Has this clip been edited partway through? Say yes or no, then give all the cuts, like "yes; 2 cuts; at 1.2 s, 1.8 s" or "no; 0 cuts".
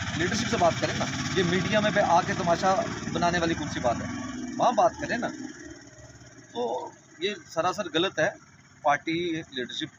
no; 0 cuts